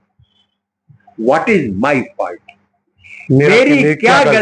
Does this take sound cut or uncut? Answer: uncut